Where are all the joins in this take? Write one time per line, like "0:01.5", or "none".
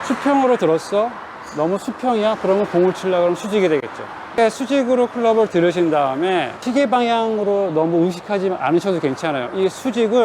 0:04.3